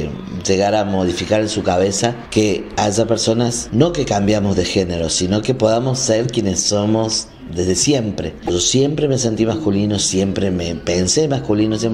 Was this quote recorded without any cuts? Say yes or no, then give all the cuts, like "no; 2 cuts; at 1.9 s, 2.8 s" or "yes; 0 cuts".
no; 3 cuts; at 2.2 s, 3.6 s, 8.5 s